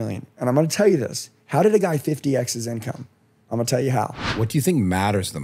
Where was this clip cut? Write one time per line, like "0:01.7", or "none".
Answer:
0:04.3